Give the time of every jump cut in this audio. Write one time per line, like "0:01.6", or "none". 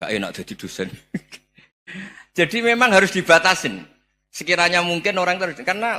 none